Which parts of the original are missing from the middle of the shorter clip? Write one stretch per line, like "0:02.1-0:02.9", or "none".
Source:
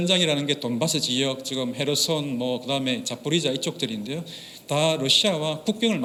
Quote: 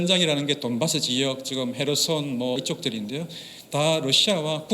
0:02.6-0:03.5

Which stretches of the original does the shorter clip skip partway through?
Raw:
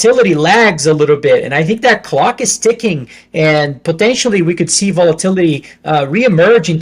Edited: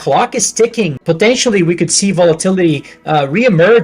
0:03.0-0:03.8

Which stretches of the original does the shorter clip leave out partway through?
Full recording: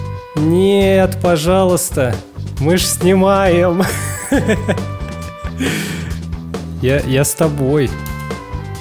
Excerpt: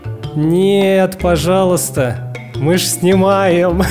none

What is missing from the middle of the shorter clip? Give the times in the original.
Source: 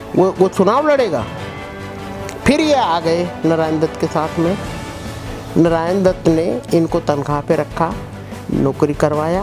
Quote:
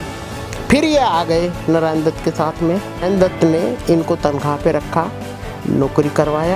0:04.8-0:05.8

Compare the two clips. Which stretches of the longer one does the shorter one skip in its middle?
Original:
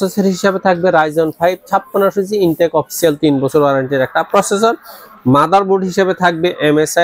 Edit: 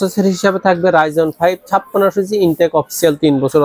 none

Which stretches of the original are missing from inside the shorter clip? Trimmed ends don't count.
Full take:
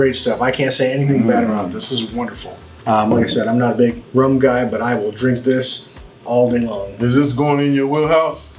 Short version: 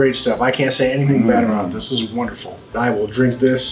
0:02.7-0:04.8

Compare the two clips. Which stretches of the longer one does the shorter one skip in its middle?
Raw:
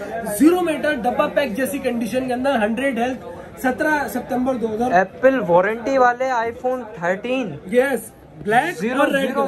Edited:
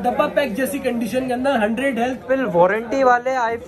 0:03.2-0:05.1

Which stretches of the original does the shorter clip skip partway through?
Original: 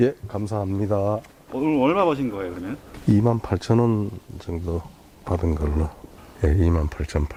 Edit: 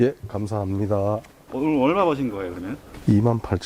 none

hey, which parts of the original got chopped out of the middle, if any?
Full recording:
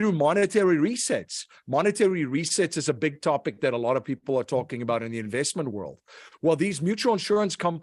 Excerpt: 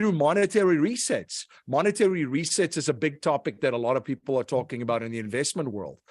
none

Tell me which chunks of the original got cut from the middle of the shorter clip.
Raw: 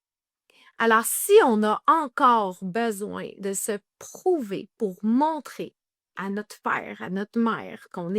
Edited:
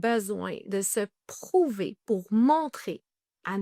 none

